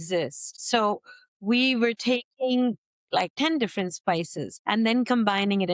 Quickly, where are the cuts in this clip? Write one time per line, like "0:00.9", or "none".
0:03.3